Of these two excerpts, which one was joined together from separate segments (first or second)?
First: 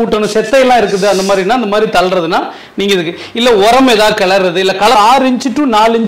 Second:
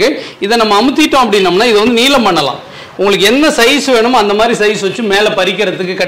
first